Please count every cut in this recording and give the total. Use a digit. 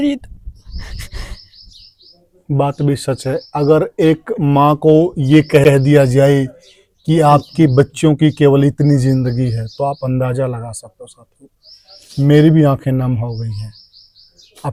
0